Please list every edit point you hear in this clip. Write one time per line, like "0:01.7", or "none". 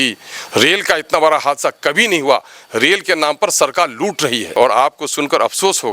0:04.5